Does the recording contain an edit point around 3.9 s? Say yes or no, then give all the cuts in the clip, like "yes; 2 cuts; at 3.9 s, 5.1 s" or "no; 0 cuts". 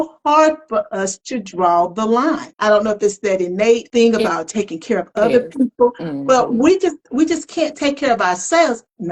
yes; 2 cuts; at 2.5 s, 3.9 s